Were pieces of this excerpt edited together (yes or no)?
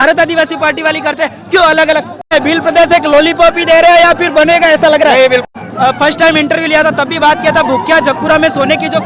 yes